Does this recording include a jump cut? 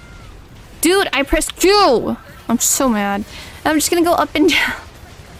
no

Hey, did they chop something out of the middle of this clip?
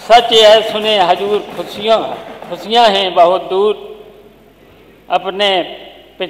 no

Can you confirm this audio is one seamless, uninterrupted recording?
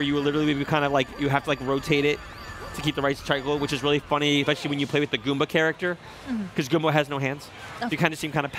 yes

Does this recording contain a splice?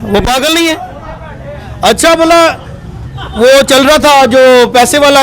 no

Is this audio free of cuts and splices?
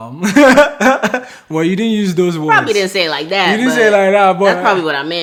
yes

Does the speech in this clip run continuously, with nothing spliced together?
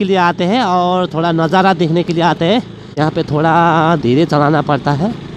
no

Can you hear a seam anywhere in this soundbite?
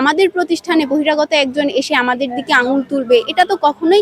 no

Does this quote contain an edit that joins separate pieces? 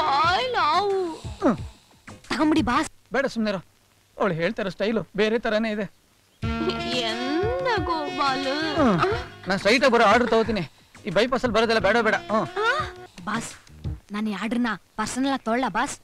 yes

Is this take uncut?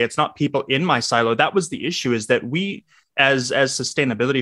yes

